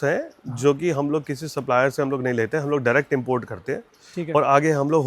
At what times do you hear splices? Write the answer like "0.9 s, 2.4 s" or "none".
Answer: none